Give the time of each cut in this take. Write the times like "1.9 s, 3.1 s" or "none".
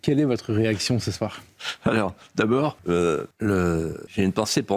3.2 s